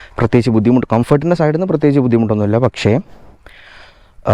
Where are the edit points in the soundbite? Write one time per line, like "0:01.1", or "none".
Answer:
none